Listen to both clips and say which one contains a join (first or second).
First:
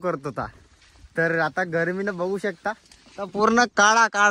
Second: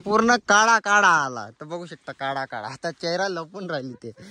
second